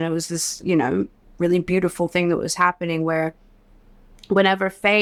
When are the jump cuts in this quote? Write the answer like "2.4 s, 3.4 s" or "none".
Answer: none